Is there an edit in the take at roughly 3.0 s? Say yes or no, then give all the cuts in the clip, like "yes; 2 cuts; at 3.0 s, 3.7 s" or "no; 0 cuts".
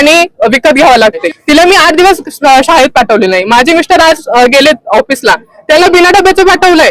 no; 1 cut; at 1.3 s